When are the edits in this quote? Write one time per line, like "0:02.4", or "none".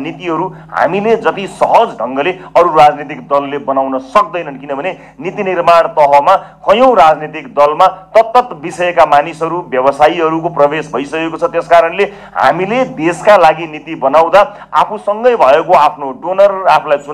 none